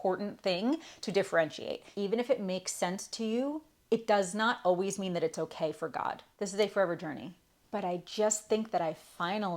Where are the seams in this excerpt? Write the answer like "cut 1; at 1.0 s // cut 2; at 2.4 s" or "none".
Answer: cut 1; at 1.9 s // cut 2; at 6.3 s